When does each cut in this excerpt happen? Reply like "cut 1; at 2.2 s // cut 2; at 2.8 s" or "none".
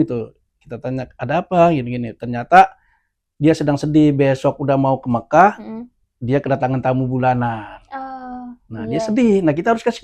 none